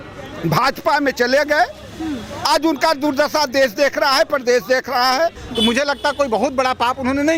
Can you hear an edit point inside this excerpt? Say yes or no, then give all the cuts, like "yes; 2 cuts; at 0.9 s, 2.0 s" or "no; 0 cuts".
yes; 1 cut; at 5.4 s